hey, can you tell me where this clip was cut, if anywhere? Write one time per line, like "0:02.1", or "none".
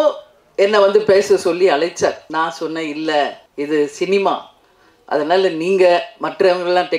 0:02.2
0:03.4